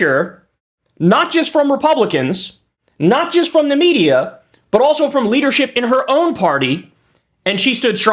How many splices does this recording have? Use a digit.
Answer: 0